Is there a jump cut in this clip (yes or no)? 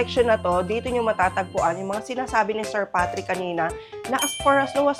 no